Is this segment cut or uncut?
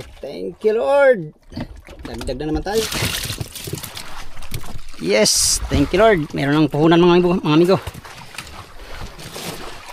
cut